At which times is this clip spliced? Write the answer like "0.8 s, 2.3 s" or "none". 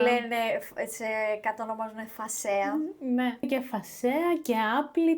3.5 s